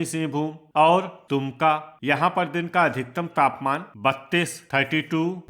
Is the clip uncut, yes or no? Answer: no